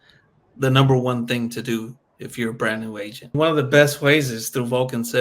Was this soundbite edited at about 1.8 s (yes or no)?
no